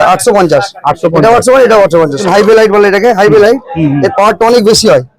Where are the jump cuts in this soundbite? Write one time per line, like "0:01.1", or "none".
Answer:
0:02.2